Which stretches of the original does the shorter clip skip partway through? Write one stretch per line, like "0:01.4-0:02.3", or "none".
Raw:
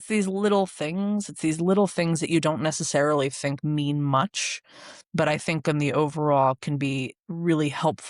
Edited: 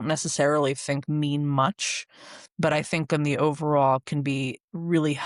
none